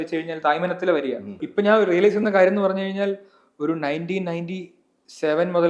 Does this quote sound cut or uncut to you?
cut